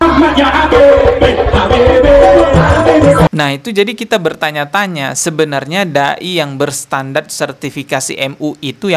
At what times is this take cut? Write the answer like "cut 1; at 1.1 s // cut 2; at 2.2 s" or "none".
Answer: cut 1; at 3.3 s